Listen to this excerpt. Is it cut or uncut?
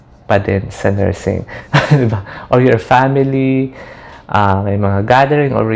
cut